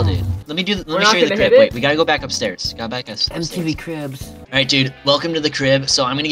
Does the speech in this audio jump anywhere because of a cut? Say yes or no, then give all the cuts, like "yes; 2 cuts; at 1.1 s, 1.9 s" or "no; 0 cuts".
no; 0 cuts